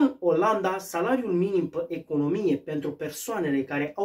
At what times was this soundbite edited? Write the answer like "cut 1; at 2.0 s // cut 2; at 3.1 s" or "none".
none